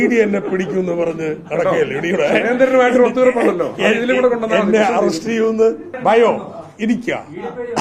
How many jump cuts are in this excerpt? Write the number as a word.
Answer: one